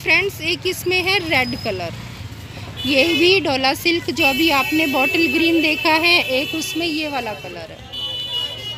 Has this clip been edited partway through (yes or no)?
no